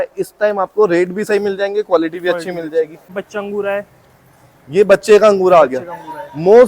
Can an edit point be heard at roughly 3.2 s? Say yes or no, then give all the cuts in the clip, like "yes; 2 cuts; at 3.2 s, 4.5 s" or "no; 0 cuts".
yes; 1 cut; at 3.2 s